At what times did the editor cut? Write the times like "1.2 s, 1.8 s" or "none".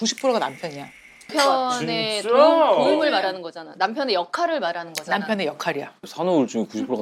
6.0 s